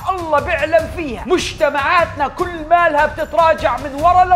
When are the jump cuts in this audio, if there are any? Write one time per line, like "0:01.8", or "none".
none

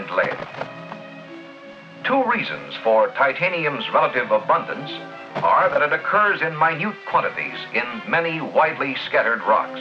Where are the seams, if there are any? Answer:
0:07.4

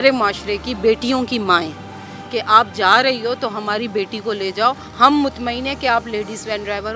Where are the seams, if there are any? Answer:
none

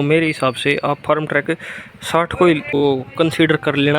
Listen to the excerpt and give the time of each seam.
0:02.8

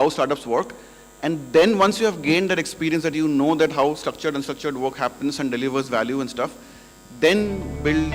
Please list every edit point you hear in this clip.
none

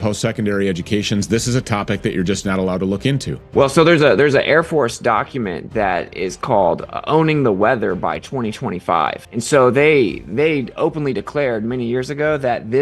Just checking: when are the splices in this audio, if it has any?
0:03.4
0:09.2

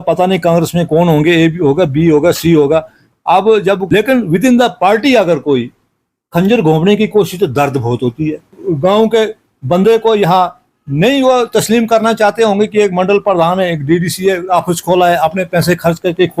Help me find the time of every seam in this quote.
0:03.8
0:08.6

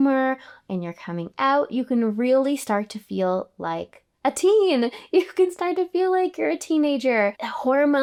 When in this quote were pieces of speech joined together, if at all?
none

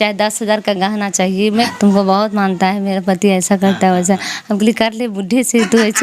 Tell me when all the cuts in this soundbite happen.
0:01.7

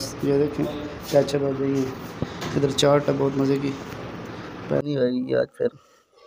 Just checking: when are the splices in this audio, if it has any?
0:04.8

